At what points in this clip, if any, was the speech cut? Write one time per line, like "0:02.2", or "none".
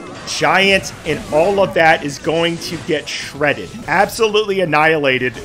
none